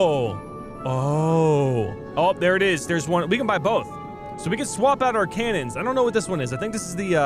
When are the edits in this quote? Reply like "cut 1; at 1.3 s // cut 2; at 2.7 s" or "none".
none